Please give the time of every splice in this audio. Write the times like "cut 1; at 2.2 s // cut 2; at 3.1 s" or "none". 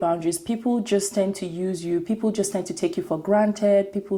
none